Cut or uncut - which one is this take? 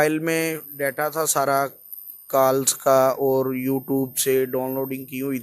uncut